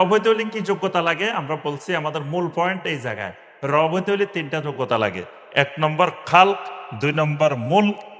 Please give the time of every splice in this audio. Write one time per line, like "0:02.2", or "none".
none